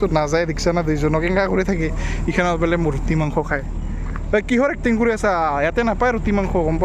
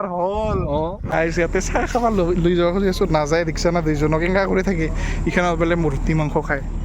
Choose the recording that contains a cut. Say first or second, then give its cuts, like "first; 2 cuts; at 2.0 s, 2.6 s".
second; 1 cut; at 1.0 s